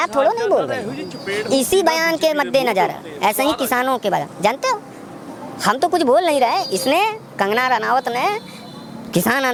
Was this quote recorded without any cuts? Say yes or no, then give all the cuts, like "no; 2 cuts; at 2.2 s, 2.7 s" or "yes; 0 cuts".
yes; 0 cuts